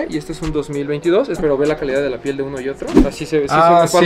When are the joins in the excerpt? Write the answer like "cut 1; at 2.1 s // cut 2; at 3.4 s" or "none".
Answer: cut 1; at 1.4 s